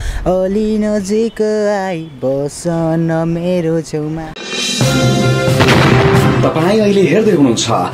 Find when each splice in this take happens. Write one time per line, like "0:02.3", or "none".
0:04.3